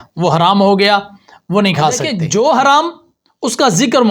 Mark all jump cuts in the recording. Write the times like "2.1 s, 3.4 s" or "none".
2.2 s